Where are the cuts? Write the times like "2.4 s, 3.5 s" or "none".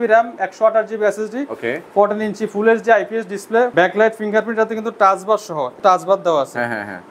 3.7 s, 5.7 s